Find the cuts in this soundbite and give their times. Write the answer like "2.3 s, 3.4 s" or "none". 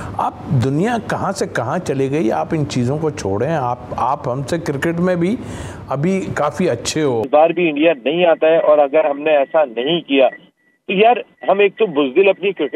7.3 s